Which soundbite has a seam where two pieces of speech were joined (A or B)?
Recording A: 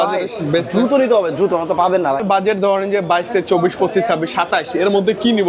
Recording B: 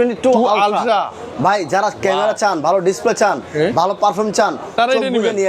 A